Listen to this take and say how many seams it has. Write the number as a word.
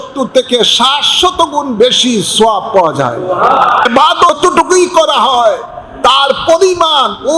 one